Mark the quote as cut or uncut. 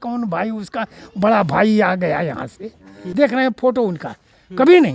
cut